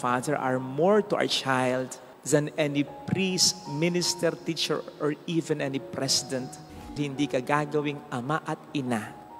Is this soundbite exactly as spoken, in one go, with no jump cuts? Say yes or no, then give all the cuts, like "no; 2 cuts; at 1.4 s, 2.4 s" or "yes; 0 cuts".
no; 1 cut; at 6.9 s